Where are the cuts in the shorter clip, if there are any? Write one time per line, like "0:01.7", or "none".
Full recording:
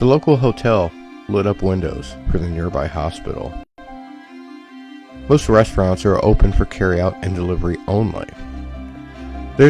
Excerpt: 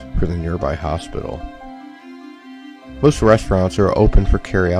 0:01.5